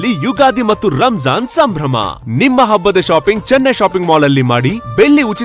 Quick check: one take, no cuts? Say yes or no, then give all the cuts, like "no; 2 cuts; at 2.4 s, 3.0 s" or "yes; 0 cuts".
yes; 0 cuts